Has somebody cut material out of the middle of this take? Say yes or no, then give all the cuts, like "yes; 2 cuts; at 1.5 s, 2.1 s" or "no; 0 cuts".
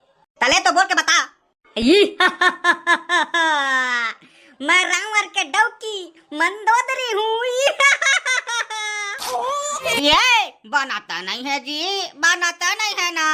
yes; 1 cut; at 9.9 s